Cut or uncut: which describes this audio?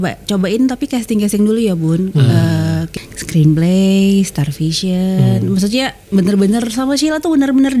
cut